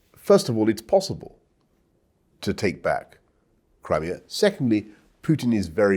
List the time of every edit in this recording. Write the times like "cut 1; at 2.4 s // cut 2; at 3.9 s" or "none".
none